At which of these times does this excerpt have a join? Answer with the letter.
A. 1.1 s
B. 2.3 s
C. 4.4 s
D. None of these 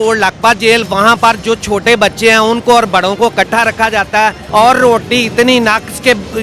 C